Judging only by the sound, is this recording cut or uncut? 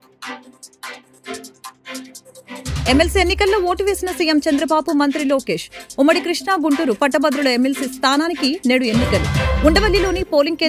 uncut